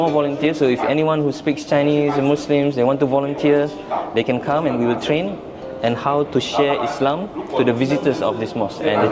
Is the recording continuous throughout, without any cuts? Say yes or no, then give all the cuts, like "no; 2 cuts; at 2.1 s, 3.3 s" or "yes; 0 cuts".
yes; 0 cuts